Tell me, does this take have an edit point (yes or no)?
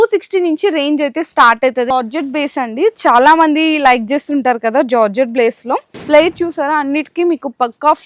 yes